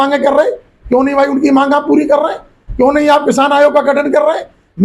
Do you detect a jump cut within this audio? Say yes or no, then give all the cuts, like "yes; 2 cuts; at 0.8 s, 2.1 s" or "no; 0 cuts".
no; 0 cuts